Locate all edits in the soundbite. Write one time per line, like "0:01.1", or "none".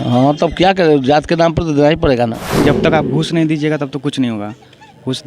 0:02.6